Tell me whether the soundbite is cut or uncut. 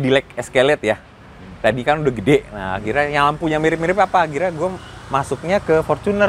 uncut